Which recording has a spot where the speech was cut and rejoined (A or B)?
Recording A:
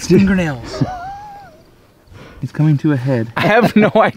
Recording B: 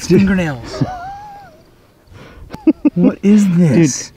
A